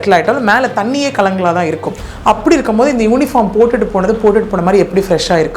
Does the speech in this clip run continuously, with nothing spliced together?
yes; 0 cuts

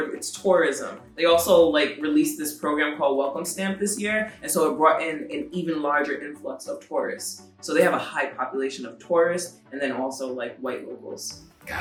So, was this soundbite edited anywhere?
no; 0 cuts

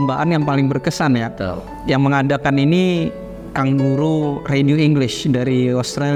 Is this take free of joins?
yes; 0 cuts

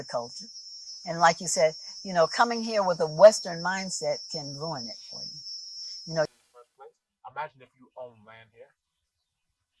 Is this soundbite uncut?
no; 1 cut; at 6.3 s

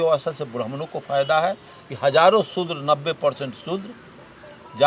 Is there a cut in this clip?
no; 0 cuts

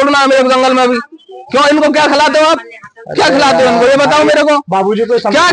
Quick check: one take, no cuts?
yes; 0 cuts

